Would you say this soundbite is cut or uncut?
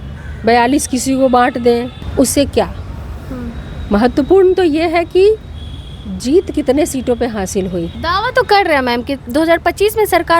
cut